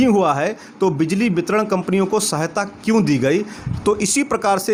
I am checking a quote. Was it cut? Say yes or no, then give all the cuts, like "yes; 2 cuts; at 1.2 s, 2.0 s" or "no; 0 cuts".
no; 0 cuts